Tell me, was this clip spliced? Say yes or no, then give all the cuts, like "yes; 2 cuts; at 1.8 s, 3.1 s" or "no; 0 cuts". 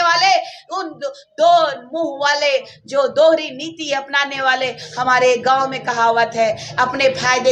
no; 0 cuts